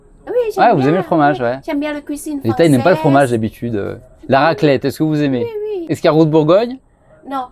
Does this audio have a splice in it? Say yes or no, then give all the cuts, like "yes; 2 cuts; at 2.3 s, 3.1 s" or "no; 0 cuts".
yes; 1 cut; at 5.8 s